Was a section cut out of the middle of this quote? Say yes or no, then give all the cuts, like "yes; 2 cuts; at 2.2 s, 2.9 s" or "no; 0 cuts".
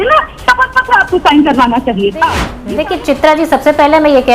yes; 1 cut; at 2.8 s